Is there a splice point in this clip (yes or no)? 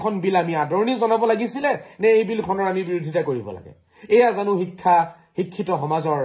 no